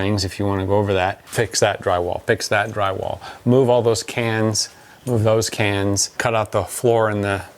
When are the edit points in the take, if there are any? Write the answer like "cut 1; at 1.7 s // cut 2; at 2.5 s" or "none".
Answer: cut 1; at 1.3 s